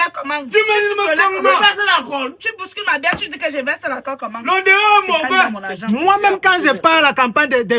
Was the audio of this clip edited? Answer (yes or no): yes